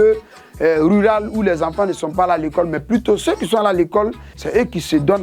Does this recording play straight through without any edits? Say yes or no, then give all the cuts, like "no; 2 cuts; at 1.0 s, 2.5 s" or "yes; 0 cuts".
no; 1 cut; at 4.3 s